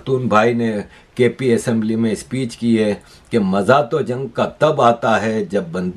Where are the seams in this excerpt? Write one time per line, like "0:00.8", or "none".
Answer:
none